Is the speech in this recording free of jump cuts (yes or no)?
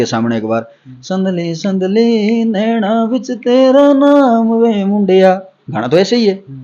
yes